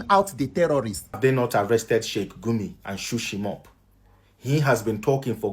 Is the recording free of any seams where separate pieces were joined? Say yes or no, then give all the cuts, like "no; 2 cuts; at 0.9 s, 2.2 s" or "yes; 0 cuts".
no; 1 cut; at 1.2 s